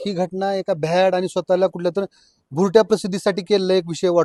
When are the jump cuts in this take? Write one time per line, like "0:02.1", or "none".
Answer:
none